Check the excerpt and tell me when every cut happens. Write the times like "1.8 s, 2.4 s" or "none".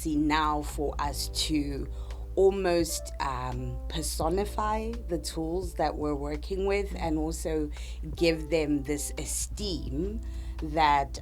none